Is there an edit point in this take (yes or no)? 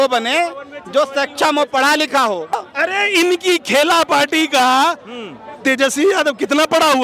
yes